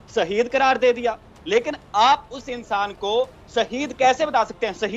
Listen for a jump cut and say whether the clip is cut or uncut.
cut